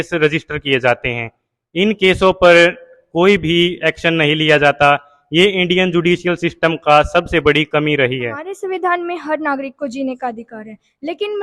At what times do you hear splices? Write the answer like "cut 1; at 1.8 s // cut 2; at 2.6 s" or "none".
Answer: cut 1; at 8.5 s